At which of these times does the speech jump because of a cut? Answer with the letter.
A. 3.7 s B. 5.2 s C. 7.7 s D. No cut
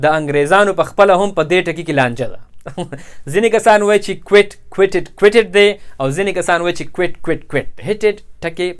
C